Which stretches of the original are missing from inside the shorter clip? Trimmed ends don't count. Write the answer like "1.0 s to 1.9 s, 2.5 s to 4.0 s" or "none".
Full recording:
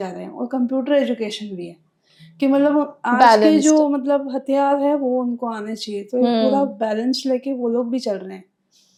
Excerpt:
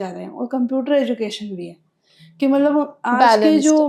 none